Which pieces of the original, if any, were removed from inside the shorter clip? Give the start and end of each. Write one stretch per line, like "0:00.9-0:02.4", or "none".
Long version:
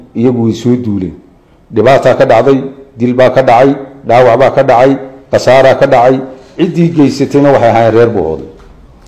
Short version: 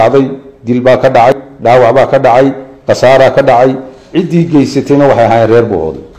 0:03.7-0:03.8